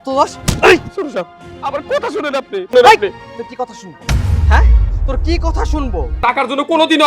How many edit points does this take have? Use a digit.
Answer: 1